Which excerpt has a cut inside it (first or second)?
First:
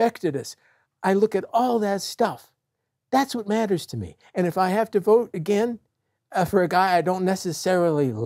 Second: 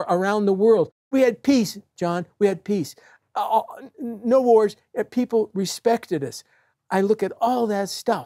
second